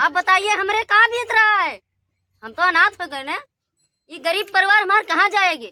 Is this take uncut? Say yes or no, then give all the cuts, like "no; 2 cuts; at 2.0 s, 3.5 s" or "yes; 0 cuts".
yes; 0 cuts